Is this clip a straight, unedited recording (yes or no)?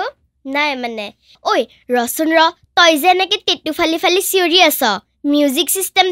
no